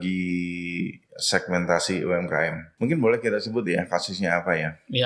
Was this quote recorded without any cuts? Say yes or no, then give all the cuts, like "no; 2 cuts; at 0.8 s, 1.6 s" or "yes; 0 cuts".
no; 1 cut; at 2.6 s